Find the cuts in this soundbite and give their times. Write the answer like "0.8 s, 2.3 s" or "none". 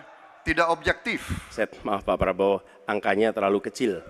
1.5 s